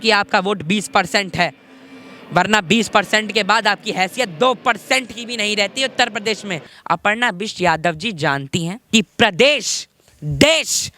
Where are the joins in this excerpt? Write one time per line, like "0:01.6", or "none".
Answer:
0:06.7
0:08.8